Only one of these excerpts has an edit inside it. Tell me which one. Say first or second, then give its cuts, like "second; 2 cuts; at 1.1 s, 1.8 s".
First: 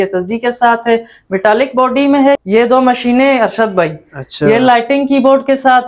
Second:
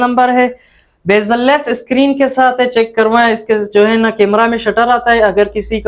first; 1 cut; at 2.4 s